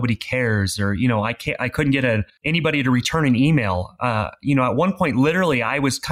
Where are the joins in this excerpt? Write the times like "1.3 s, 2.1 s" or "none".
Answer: 2.3 s